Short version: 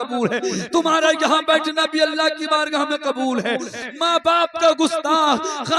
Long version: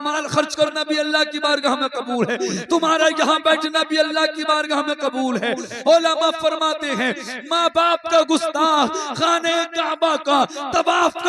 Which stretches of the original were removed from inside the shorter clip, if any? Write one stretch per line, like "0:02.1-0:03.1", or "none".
0:05.7-0:07.3